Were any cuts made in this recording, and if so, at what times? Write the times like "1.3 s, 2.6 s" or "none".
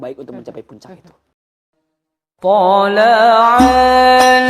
1.3 s